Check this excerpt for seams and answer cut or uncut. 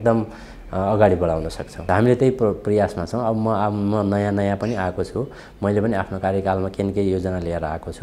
cut